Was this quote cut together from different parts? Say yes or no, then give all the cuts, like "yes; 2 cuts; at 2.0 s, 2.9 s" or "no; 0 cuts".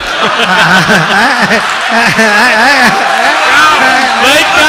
no; 0 cuts